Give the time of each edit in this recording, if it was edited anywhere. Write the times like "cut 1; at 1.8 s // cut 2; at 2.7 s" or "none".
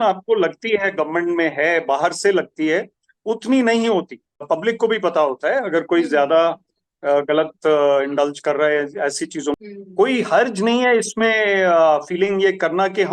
cut 1; at 4.4 s // cut 2; at 9.5 s